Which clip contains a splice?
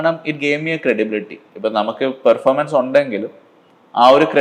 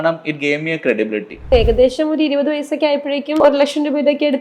second; 2 cuts; at 1.4 s, 3.4 s

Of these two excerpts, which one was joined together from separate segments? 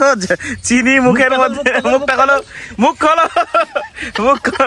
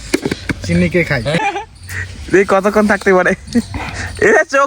second; 1 cut; at 1.4 s

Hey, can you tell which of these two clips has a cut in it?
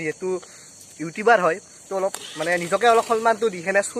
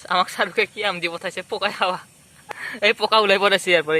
second; 1 cut; at 2.4 s

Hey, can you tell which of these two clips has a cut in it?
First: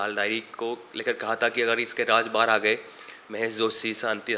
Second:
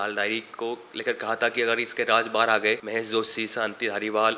second; 1 cut; at 2.8 s

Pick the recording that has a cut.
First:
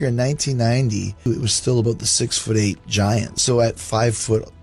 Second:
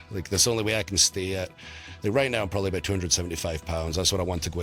first; 2 cuts; at 1.3 s, 3.3 s

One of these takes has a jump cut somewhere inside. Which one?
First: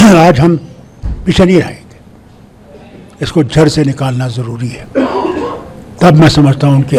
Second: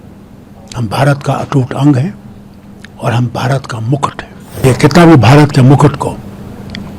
second; 1 cut; at 4.6 s

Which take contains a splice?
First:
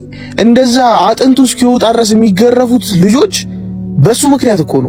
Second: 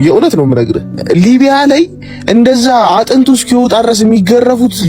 second; 1 cut; at 1.0 s

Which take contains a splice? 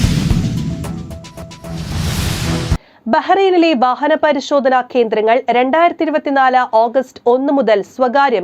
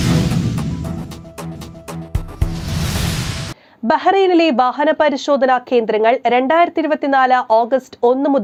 first; 1 cut; at 1.6 s

